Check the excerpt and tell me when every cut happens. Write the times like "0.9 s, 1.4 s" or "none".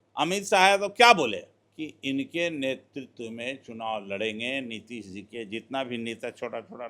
1.6 s